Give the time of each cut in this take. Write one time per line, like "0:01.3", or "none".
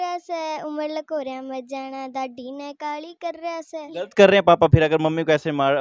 0:03.9